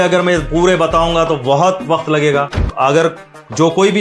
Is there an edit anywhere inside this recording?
yes; 1 cut; at 2.7 s

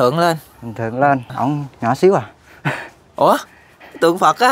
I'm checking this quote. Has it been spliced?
yes; 1 cut; at 1.3 s

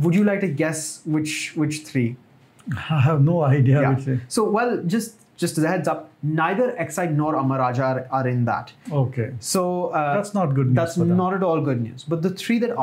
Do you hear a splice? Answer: no; 0 cuts

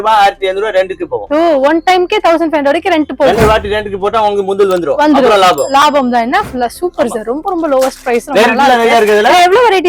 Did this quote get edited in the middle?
no; 0 cuts

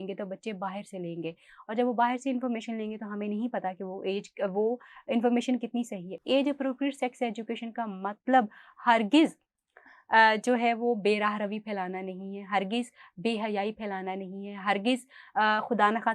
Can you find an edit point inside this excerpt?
no; 0 cuts

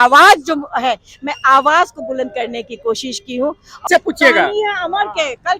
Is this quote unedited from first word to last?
no; 1 cut; at 3.8 s

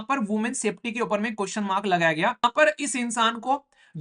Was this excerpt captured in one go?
no; 1 cut; at 2.4 s

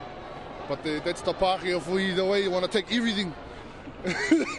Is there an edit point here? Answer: no; 0 cuts

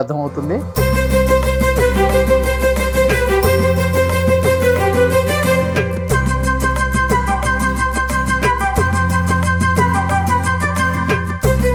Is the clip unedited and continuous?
yes; 0 cuts

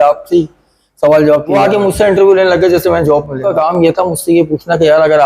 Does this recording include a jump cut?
yes; 2 cuts; at 1.5 s, 3.5 s

